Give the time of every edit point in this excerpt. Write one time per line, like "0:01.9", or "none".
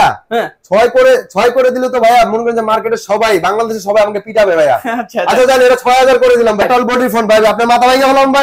0:06.6